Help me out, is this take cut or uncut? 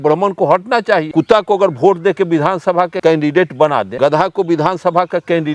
cut